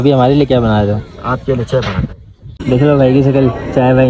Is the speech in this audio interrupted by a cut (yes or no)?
yes